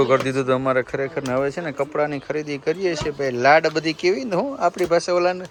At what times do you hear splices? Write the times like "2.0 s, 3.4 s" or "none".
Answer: none